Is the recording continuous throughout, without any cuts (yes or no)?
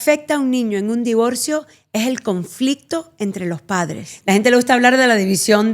no